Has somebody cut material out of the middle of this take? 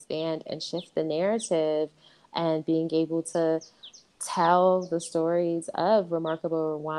no; 0 cuts

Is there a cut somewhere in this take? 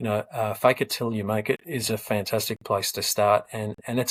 no; 0 cuts

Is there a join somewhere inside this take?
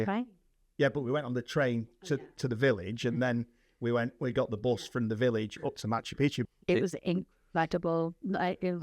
yes; 1 cut; at 6.4 s

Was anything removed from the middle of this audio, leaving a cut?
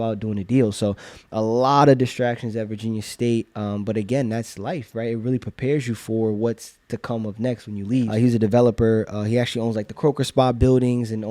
yes; 1 cut; at 8.1 s

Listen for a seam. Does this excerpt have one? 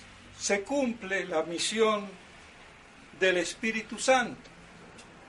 no; 0 cuts

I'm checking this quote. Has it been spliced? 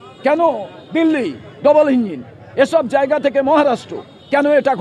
no; 0 cuts

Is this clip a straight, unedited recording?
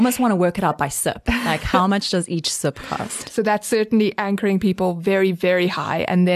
yes; 0 cuts

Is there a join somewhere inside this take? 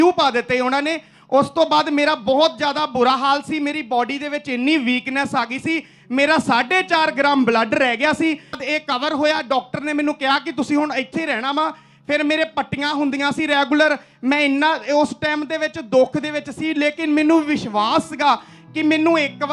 yes; 1 cut; at 8.6 s

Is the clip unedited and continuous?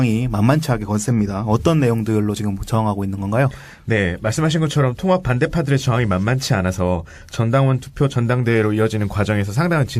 yes; 0 cuts

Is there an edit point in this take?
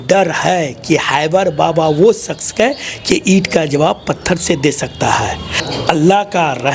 yes; 1 cut; at 5.5 s

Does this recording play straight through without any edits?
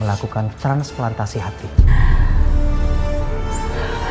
yes; 0 cuts

